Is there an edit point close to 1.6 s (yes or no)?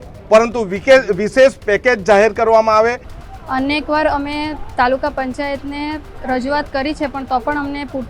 no